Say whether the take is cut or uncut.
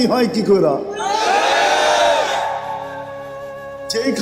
uncut